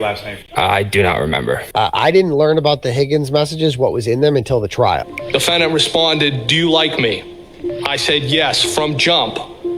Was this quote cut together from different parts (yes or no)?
yes